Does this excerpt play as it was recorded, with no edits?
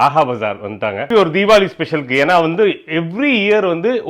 no; 1 cut; at 1.0 s

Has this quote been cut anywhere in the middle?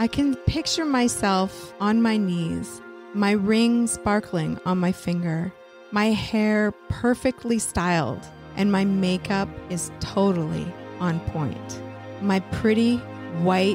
no; 0 cuts

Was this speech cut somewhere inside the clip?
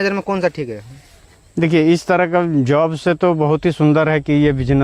no; 0 cuts

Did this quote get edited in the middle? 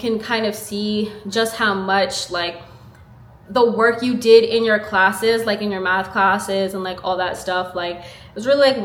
no; 0 cuts

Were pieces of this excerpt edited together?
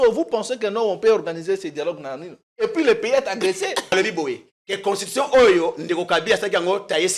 yes; 1 cut; at 3.9 s

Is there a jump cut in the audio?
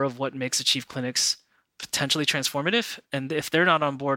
yes; 1 cut; at 3.0 s

